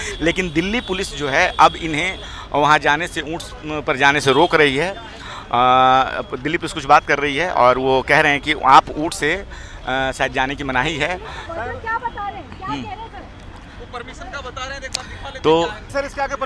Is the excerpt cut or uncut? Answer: uncut